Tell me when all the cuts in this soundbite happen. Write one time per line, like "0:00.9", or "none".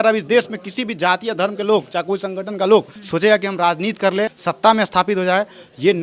0:03.0
0:04.4